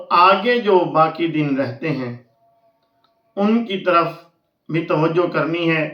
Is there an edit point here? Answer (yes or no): no